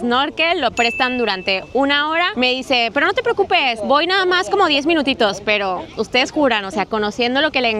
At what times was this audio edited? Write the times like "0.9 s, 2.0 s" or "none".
none